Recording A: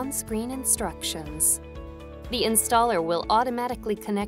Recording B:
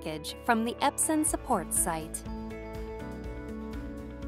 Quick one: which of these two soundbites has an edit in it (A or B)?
B